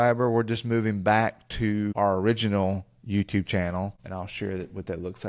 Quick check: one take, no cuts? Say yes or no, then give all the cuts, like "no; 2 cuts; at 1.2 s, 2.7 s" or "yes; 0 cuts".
no; 2 cuts; at 1.9 s, 4.0 s